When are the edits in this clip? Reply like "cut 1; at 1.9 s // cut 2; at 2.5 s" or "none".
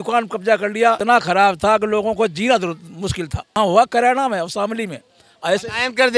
cut 1; at 1.0 s // cut 2; at 3.6 s